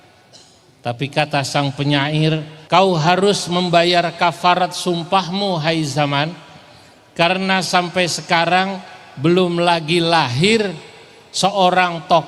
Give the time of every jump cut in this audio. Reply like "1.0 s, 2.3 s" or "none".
2.5 s